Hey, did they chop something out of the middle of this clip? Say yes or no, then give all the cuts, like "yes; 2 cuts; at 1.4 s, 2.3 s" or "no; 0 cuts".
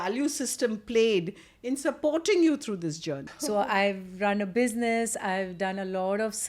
yes; 1 cut; at 3.3 s